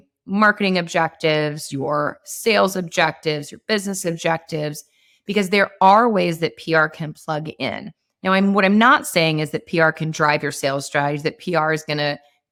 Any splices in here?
no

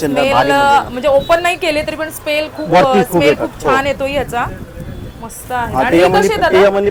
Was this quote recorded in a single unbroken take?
yes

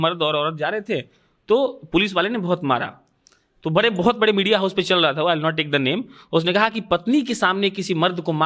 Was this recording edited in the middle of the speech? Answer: no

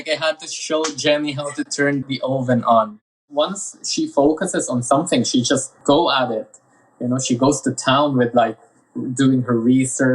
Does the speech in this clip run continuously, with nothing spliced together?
no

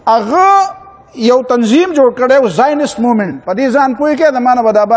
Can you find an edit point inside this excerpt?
yes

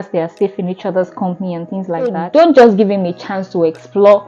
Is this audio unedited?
no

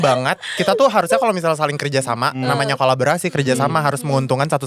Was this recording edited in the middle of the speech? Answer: no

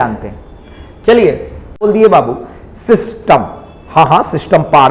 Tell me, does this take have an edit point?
yes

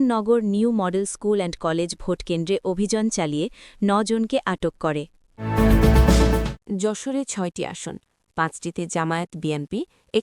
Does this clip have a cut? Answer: yes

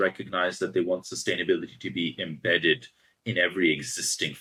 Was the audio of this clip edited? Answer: no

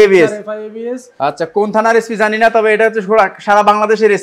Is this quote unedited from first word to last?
no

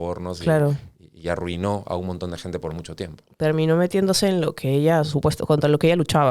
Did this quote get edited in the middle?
no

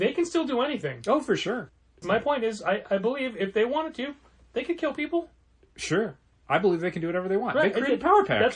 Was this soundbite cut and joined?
yes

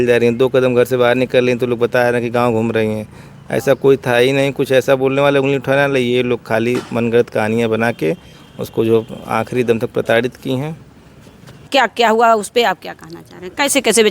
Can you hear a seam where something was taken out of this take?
yes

